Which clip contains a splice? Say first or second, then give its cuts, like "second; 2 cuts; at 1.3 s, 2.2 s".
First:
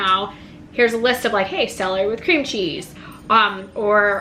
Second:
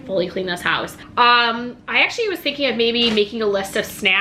second; 1 cut; at 1.0 s